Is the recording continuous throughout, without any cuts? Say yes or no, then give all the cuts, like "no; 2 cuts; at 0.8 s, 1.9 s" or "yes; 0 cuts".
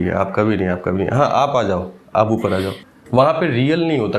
no; 1 cut; at 2.8 s